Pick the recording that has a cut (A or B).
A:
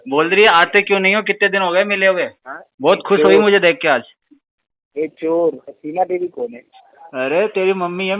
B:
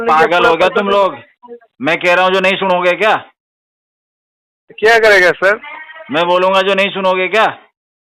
A